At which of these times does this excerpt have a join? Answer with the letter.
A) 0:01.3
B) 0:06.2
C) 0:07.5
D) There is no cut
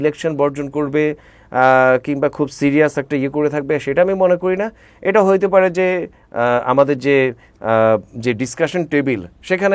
B